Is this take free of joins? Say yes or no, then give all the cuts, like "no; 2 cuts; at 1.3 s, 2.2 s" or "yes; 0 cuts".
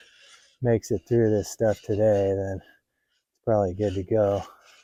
yes; 0 cuts